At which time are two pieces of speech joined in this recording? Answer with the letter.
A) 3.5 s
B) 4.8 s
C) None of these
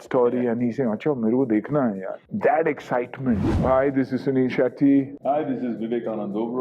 A